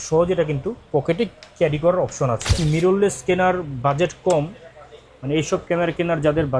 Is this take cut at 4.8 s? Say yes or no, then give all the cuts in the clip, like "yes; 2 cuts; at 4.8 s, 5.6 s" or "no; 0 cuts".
no; 1 cut; at 2.6 s